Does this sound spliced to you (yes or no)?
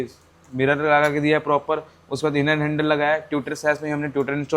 no